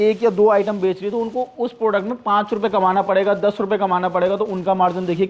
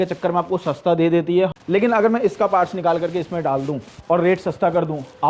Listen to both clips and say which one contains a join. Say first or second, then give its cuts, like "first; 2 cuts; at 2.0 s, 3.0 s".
second; 1 cut; at 1.6 s